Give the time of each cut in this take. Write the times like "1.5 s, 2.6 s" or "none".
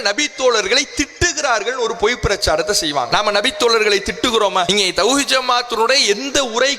3.1 s, 4.7 s